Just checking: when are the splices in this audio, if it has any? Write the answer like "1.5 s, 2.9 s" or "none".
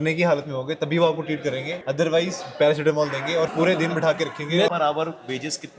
1.7 s, 3.5 s, 4.7 s